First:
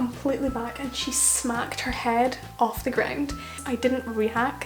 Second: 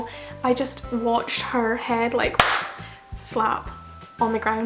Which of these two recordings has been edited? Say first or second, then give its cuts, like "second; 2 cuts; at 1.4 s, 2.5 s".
first; 1 cut; at 3.6 s